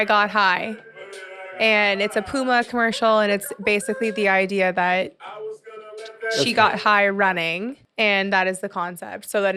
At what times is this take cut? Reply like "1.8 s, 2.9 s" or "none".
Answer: none